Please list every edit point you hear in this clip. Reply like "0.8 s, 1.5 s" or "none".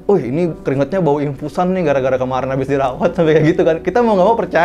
none